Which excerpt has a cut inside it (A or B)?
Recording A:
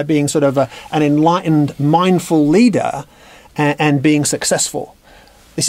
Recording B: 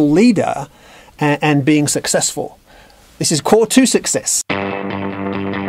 B